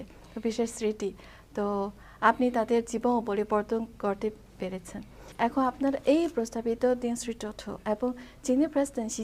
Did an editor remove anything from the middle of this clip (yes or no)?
yes